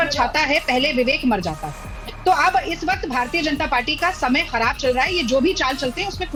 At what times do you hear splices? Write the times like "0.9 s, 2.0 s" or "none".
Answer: none